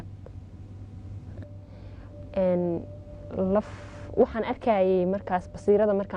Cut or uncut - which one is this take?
cut